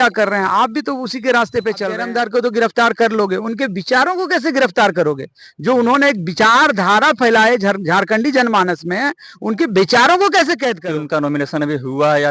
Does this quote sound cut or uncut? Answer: cut